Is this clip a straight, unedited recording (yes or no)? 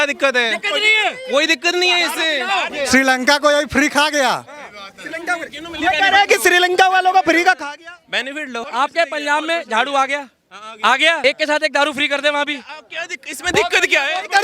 no